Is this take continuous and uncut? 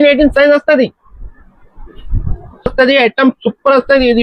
yes; 0 cuts

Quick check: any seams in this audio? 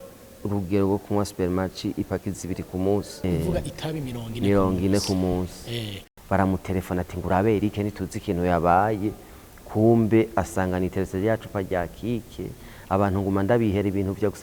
yes; 2 cuts; at 3.2 s, 6.0 s

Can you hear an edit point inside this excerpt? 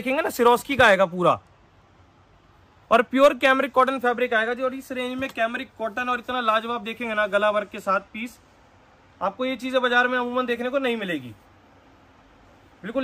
no; 0 cuts

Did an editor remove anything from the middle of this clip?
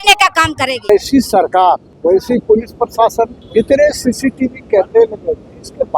yes; 3 cuts; at 0.9 s, 1.9 s, 3.4 s

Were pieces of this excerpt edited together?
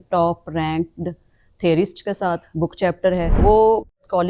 yes; 1 cut; at 3.4 s

